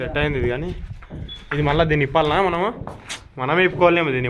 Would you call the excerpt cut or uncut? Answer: uncut